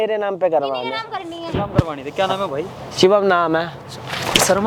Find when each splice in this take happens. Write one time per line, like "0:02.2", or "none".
none